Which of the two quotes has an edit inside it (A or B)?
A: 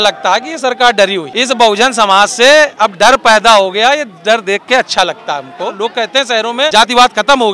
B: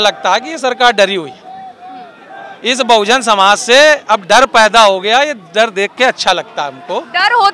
A